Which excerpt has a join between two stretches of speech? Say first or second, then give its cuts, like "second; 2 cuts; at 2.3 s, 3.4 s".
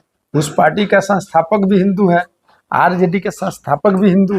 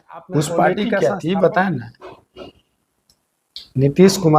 second; 1 cut; at 1.0 s